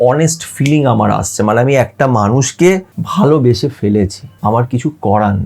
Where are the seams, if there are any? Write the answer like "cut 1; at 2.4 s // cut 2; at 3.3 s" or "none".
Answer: cut 1; at 3.0 s // cut 2; at 4.2 s